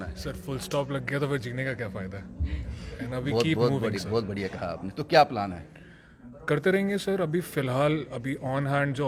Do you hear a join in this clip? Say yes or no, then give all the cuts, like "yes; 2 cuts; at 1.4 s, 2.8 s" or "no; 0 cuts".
no; 0 cuts